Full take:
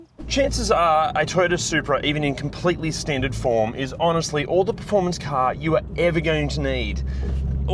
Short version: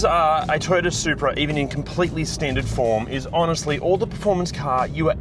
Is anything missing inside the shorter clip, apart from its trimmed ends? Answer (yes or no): no